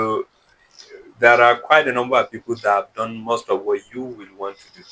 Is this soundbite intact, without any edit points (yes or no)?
yes